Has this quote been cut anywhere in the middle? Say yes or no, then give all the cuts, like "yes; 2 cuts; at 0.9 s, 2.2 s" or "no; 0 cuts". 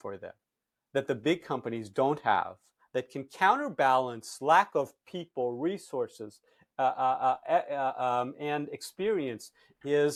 no; 0 cuts